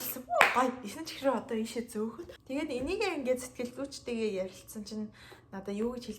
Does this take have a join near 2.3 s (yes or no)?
yes